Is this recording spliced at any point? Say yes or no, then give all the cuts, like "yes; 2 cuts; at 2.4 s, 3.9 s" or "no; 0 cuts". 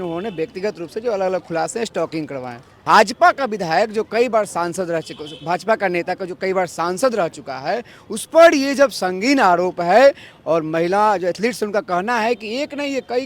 yes; 1 cut; at 2.8 s